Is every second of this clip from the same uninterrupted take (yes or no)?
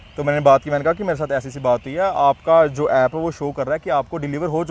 yes